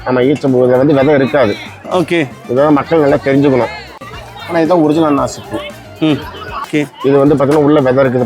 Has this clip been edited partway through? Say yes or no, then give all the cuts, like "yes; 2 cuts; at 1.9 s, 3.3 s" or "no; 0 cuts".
yes; 2 cuts; at 4.0 s, 6.7 s